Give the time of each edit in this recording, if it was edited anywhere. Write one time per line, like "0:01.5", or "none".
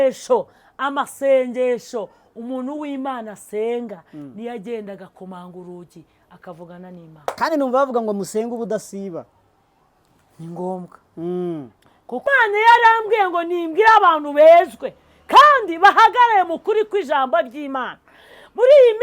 0:12.2